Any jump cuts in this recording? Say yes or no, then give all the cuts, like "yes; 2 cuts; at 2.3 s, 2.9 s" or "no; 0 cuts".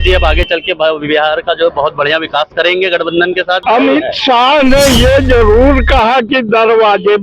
yes; 1 cut; at 3.6 s